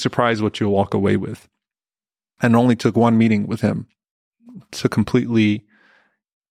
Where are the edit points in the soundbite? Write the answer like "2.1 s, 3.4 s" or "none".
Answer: 4.0 s